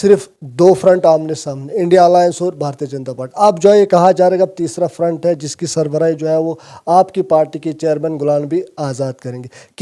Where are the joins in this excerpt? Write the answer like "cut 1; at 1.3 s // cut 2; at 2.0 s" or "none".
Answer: none